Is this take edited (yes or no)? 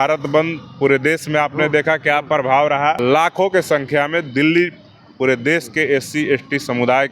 yes